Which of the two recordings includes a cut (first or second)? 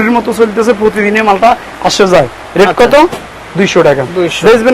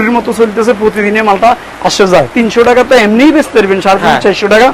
second